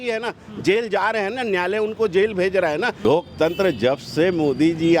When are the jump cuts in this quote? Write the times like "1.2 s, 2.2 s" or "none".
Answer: 3.0 s

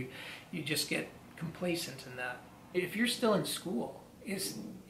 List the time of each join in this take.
2.7 s

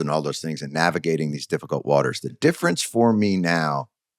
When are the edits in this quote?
2.4 s

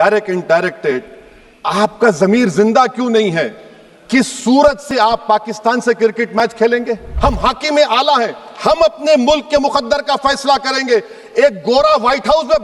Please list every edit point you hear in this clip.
7.0 s

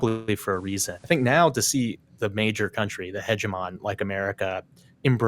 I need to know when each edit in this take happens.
0.9 s

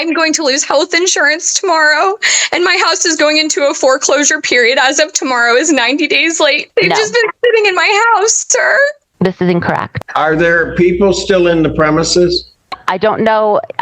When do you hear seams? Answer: 6.6 s, 9.9 s

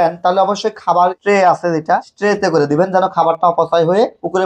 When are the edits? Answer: 1.2 s, 2.1 s

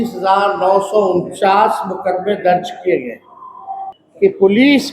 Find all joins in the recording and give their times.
3.9 s

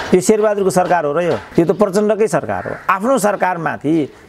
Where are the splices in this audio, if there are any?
none

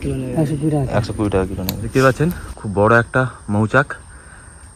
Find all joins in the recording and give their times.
1.8 s

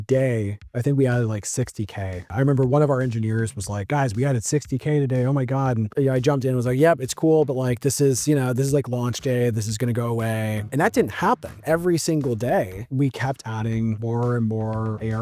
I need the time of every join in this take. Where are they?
none

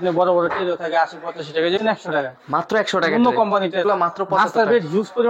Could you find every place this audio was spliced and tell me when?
1.8 s, 3.8 s

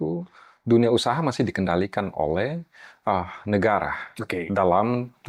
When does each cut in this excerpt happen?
none

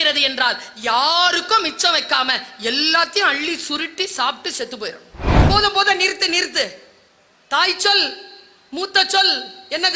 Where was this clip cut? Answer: 5.4 s

